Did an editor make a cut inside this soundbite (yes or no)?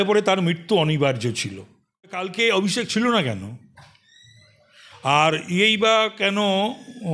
yes